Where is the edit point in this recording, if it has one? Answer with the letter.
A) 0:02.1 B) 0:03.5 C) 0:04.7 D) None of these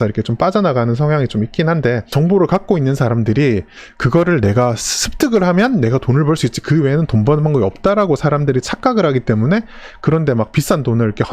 A